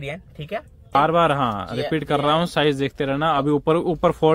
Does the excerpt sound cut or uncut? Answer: cut